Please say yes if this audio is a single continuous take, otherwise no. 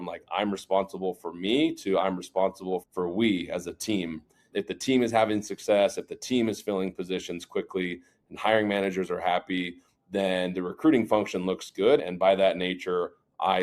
yes